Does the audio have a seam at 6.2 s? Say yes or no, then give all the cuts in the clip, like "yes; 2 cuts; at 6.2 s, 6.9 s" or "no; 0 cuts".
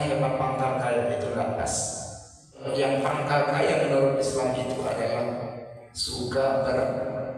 no; 1 cut; at 2.7 s